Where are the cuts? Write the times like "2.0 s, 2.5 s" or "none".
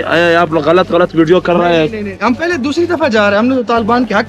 none